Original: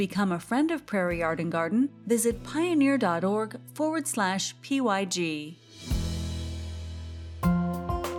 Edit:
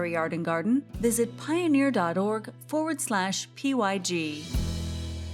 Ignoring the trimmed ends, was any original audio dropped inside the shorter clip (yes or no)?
yes